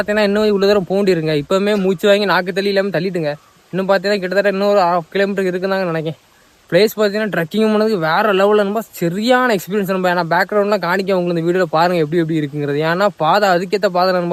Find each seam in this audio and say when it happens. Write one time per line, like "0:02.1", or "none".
none

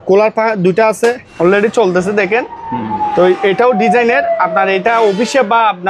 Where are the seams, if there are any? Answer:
0:01.3

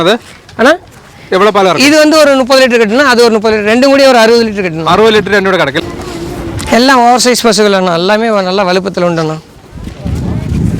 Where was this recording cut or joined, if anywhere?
0:05.8

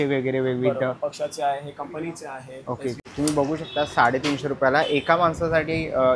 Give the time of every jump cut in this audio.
0:03.0

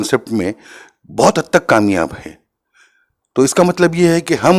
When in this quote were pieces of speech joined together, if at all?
none

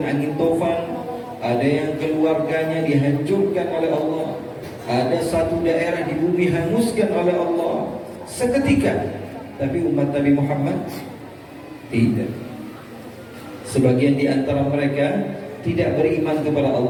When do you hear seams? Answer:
none

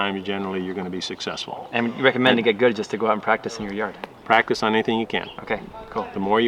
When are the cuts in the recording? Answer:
0:05.3

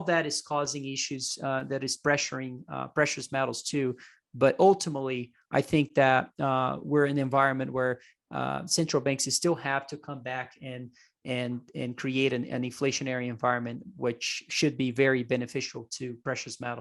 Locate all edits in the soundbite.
none

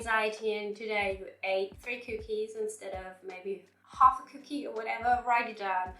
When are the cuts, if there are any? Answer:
0:01.7

